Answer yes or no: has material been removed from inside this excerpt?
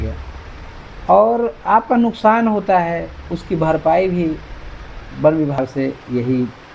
yes